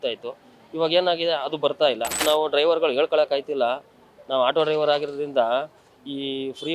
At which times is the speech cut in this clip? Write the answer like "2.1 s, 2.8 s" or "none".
2.2 s